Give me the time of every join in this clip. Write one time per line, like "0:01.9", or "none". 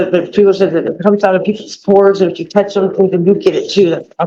none